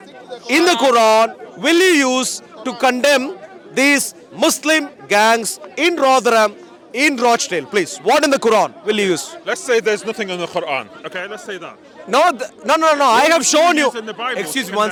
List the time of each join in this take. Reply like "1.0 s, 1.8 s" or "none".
none

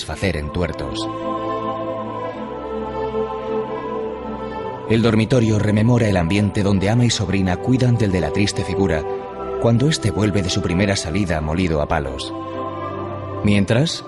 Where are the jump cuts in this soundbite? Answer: 12.2 s

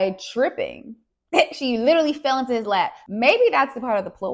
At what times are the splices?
3.0 s

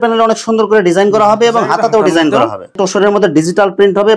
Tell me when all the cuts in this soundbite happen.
2.6 s

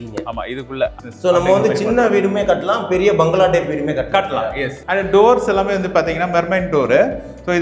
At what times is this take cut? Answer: 0.9 s, 4.8 s

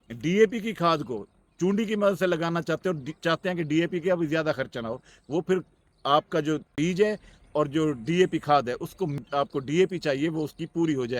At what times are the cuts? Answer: 6.7 s, 9.2 s

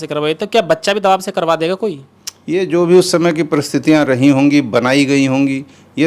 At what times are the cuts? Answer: none

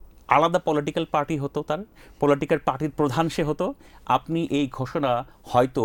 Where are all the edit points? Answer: none

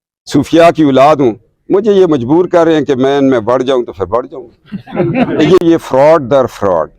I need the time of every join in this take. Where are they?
5.6 s

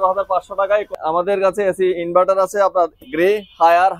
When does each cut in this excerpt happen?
0.9 s

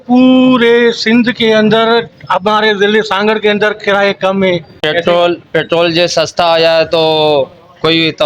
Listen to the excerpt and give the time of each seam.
4.7 s

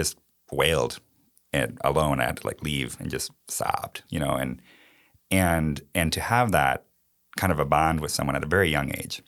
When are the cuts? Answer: none

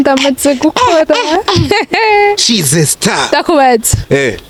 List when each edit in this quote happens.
none

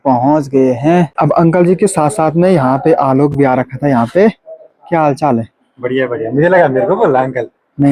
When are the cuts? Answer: 1.1 s

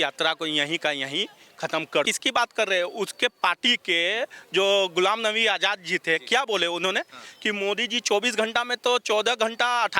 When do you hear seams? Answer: 2.1 s

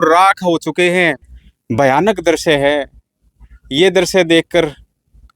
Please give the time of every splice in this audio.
1.2 s

